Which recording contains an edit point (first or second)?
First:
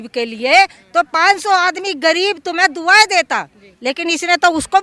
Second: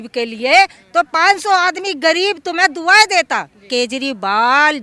second